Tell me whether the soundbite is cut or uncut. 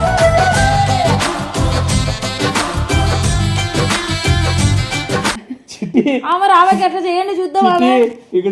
uncut